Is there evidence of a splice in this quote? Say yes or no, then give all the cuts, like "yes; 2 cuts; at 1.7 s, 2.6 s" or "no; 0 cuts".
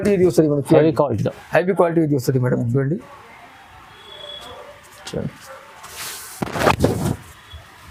no; 0 cuts